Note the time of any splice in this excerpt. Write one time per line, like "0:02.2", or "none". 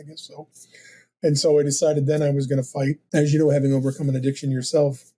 0:03.0